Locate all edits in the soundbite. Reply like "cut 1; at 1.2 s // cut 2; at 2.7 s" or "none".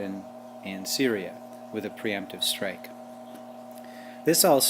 cut 1; at 2.7 s